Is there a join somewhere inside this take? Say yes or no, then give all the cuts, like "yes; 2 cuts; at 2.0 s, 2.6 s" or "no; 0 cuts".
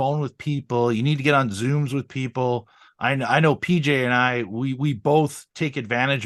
no; 0 cuts